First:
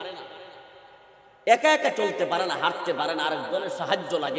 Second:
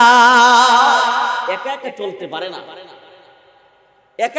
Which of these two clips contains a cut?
second; 1 cut; at 1.4 s

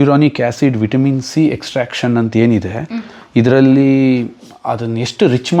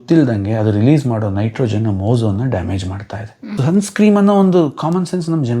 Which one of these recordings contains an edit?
second; 1 cut; at 3.5 s

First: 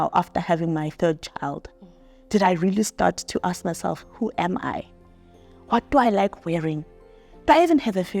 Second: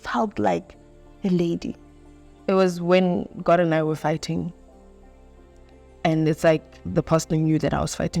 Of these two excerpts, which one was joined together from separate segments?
second; 1 cut; at 2.3 s

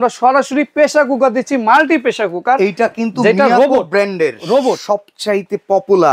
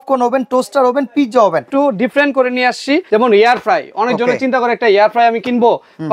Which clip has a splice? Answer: second; 2 cuts; at 1.7 s, 3.1 s

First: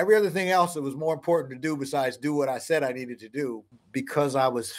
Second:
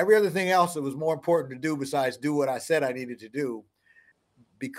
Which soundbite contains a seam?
first; 1 cut; at 3.7 s

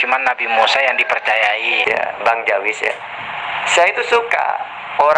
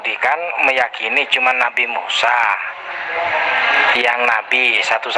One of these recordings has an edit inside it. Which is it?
first; 1 cut; at 1.8 s

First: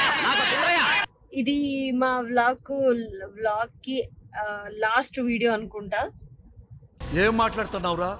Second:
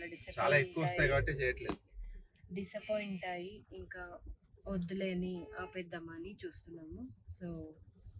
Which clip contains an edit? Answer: first; 1 cut; at 1.2 s

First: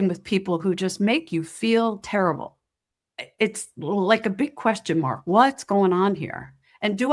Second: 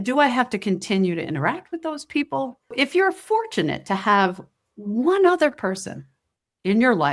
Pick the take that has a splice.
second; 1 cut; at 2.7 s

